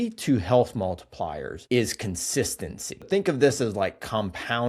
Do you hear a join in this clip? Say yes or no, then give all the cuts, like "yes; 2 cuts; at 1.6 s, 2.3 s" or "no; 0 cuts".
yes; 2 cuts; at 1.5 s, 3.1 s